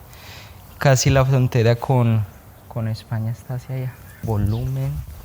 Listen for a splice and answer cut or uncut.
cut